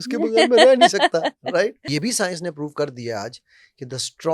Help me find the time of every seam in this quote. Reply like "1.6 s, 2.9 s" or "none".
1.9 s